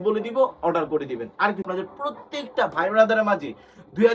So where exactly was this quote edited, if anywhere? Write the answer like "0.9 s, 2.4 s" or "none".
1.7 s